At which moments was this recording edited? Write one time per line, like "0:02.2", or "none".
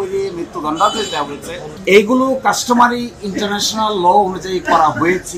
0:01.7

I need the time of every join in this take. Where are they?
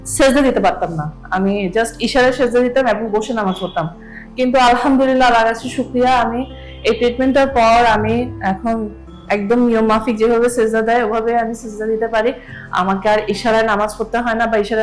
none

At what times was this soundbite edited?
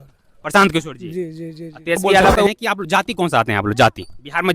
0:02.5

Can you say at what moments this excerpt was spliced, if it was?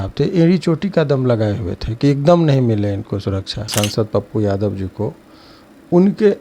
0:03.7

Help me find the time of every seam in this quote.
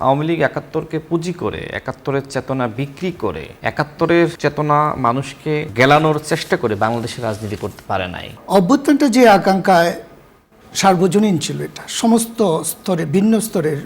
0:03.5
0:04.4
0:05.7
0:08.3

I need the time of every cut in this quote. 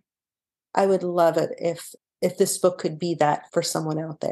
0:01.9
0:03.4

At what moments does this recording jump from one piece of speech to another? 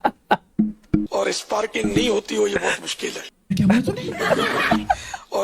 0:01.1

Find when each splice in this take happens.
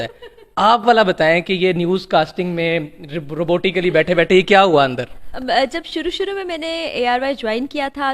none

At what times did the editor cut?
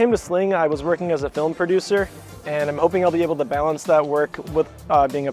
none

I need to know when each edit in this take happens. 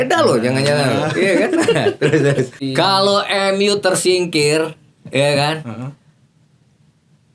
0:02.6

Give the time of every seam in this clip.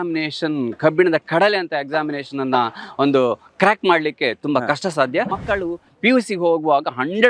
0:05.4

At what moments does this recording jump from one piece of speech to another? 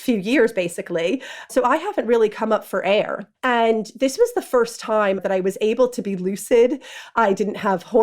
0:01.4
0:03.2
0:05.2

